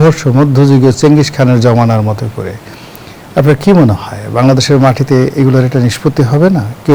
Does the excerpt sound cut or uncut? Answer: uncut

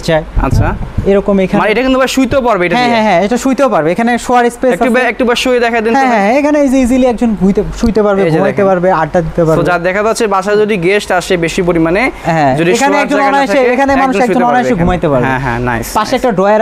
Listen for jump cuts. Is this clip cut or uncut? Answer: uncut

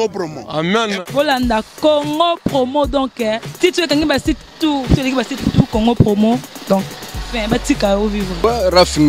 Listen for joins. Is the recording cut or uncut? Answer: uncut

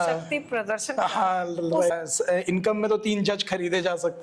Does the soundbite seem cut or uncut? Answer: cut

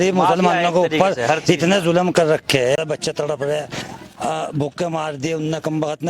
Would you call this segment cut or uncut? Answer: cut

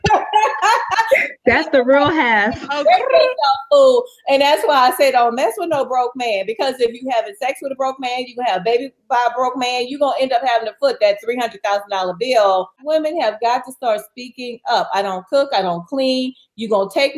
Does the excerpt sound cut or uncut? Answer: cut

